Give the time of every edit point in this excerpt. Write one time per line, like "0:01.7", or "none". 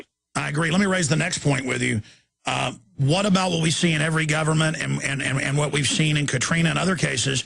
0:00.9